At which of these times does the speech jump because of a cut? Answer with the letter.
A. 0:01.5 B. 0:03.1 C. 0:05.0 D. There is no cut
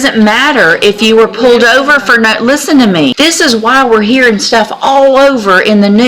B